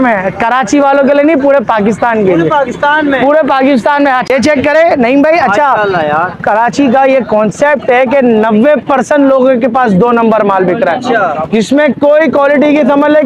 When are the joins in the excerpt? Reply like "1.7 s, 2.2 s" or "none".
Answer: 4.3 s